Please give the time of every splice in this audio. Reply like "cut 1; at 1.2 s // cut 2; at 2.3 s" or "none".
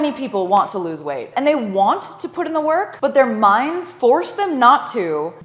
cut 1; at 1.3 s